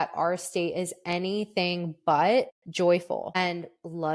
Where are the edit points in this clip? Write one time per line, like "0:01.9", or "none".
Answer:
0:02.6
0:03.4